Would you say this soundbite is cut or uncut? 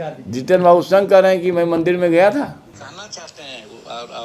cut